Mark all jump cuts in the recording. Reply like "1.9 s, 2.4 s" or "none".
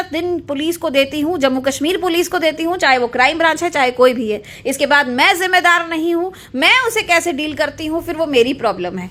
none